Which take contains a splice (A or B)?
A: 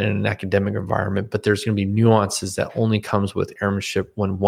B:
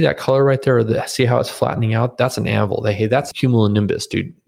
B